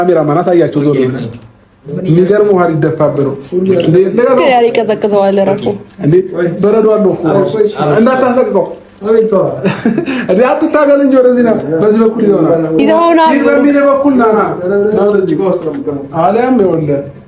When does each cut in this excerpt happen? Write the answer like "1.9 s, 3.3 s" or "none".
none